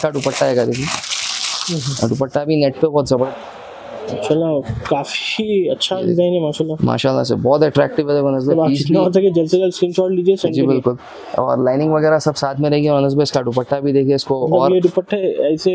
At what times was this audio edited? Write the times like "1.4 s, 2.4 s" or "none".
3.3 s